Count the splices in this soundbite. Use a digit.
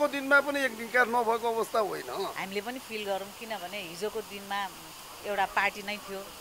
1